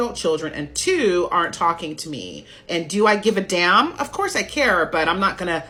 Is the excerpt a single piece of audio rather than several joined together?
yes; 0 cuts

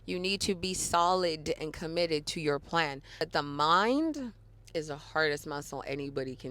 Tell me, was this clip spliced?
yes; 1 cut; at 3.2 s

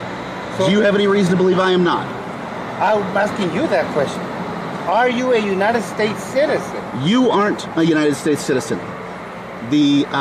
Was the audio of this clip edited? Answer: no; 0 cuts

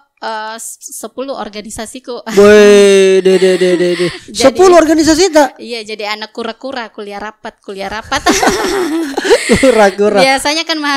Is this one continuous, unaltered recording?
yes; 0 cuts

